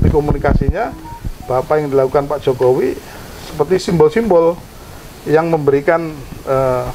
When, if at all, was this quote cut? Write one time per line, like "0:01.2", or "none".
none